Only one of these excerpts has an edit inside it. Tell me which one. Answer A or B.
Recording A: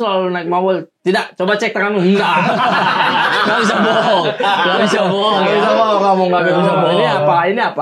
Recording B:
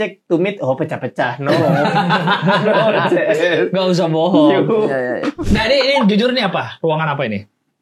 B